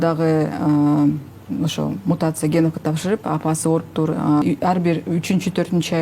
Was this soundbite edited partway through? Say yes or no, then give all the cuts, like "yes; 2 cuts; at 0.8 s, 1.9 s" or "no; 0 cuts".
yes; 1 cut; at 4.4 s